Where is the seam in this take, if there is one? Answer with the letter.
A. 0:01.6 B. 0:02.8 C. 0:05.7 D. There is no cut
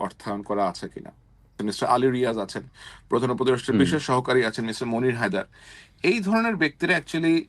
A